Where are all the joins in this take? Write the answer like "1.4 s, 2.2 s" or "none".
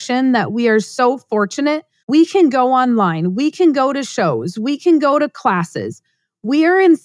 1.9 s